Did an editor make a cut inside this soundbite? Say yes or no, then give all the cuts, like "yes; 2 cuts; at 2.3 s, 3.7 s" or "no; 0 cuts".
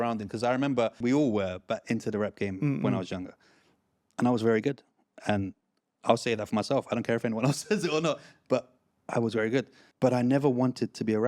yes; 2 cuts; at 1.0 s, 9.8 s